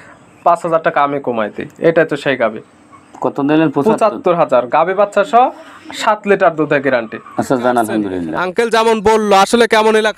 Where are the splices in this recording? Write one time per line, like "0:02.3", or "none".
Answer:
0:08.3